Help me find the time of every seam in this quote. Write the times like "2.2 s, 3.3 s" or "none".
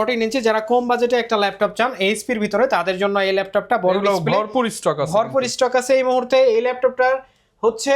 none